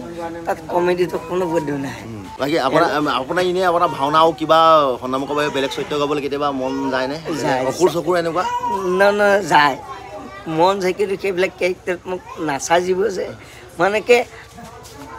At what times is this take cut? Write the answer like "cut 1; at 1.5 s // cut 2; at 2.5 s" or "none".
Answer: cut 1; at 2.3 s